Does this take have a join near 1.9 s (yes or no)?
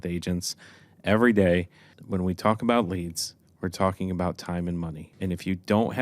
yes